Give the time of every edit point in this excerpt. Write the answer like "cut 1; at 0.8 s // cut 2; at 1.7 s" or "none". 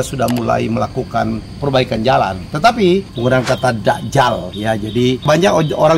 cut 1; at 1.5 s // cut 2; at 3.1 s // cut 3; at 5.3 s